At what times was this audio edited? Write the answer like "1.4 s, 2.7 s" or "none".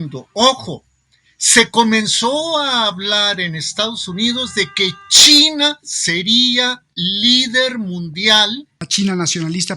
8.8 s